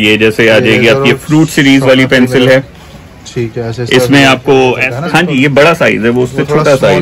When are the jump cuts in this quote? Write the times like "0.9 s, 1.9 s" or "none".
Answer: 4.9 s